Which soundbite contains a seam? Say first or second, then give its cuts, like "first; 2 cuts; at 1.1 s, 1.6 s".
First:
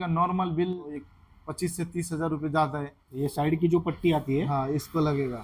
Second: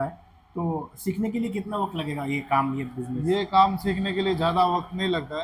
first; 2 cuts; at 1.1 s, 3.2 s